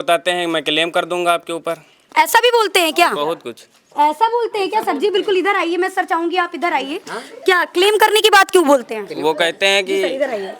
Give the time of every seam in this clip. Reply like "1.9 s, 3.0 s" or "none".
none